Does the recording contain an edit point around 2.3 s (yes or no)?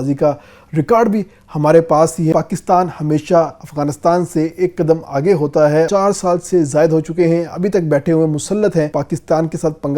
yes